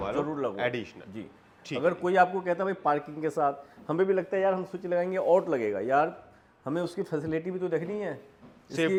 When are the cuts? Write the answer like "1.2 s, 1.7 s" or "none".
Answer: none